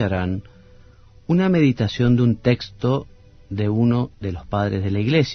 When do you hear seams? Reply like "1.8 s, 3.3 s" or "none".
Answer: 3.6 s